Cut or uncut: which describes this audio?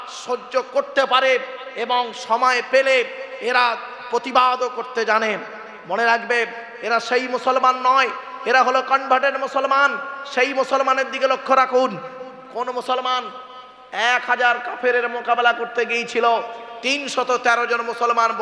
uncut